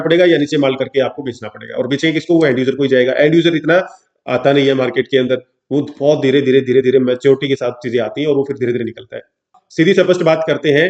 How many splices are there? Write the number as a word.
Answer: one